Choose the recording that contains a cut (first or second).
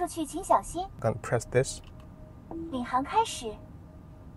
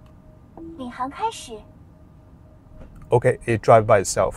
first